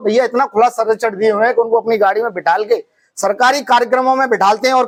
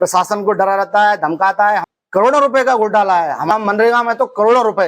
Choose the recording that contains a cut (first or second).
second